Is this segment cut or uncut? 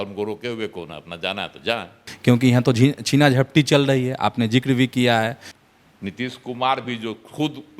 cut